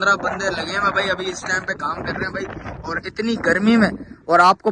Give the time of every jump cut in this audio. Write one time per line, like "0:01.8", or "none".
none